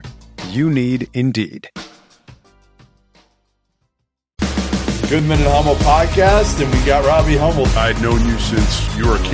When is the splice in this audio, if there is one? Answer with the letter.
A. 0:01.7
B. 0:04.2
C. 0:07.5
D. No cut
B